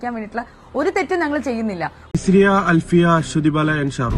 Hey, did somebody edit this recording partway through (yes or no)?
yes